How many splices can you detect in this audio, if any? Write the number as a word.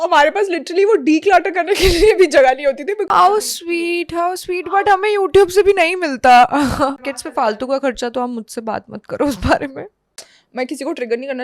three